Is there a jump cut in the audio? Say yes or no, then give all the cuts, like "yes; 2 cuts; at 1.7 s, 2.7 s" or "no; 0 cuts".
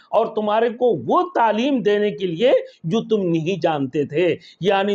no; 0 cuts